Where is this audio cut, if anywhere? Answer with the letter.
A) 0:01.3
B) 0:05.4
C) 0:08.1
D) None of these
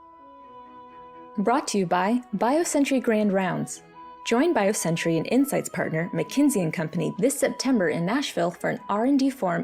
A